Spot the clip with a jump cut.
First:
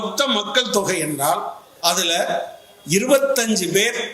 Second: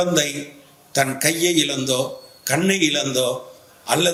first; 1 cut; at 1.6 s

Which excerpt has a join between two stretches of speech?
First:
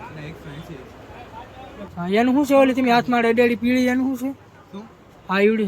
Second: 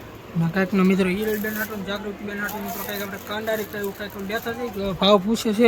first; 1 cut; at 1.9 s

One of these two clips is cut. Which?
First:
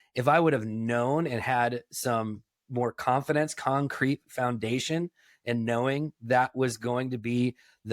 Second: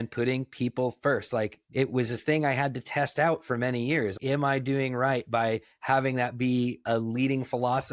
second; 1 cut; at 4.2 s

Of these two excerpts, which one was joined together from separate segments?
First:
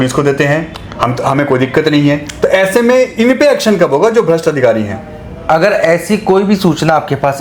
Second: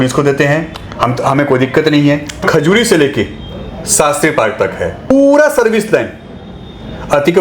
second; 2 cuts; at 2.4 s, 5.1 s

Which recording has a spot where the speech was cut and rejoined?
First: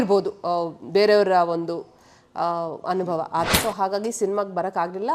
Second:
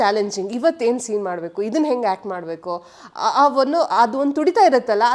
first; 1 cut; at 3.5 s

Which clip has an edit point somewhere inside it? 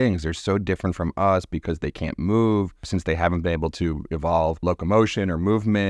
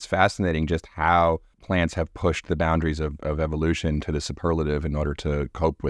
first; 2 cuts; at 2.8 s, 4.6 s

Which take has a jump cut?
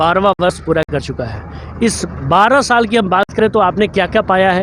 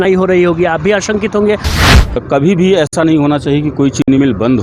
second; 1 cut; at 2.2 s

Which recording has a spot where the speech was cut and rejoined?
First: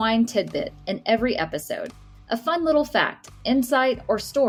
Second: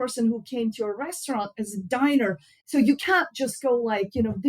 second; 1 cut; at 2.6 s

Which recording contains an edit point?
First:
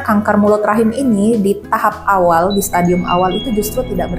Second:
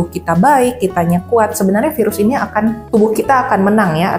second; 1 cut; at 2.8 s

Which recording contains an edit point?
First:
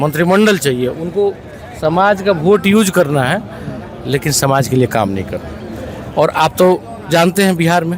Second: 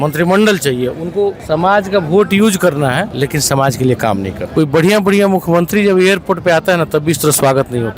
second; 3 cuts; at 1.4 s, 3.1 s, 4.4 s

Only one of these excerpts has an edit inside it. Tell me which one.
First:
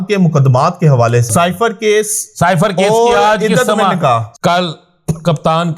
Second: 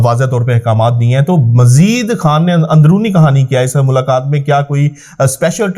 first; 2 cuts; at 1.3 s, 4.3 s

